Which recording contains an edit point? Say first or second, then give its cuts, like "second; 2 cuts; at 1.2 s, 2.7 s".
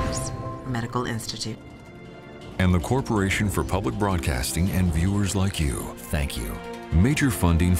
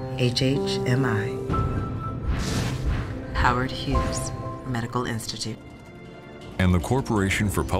first; 1 cut; at 6.9 s